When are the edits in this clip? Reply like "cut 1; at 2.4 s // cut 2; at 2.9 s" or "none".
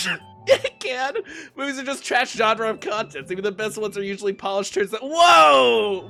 none